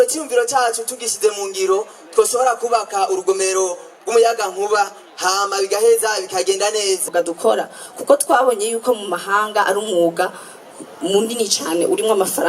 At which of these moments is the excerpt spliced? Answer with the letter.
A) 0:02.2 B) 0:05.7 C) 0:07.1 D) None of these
C